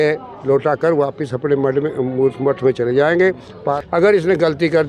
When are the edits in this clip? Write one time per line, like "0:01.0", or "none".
0:03.8